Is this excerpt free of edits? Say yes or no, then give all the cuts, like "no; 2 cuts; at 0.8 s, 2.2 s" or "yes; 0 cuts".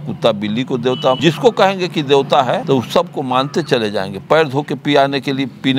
no; 2 cuts; at 1.2 s, 2.6 s